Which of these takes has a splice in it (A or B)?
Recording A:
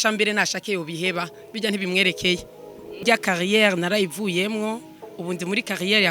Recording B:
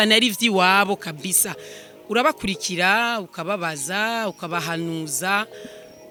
A